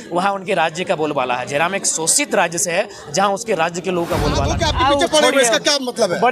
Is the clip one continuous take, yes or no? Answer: no